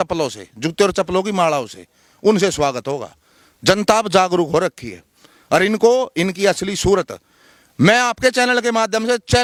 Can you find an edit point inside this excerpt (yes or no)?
no